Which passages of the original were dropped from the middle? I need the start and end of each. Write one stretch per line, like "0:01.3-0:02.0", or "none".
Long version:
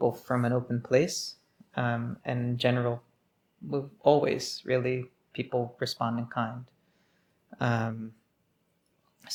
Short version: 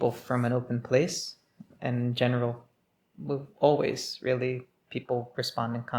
0:01.7-0:02.1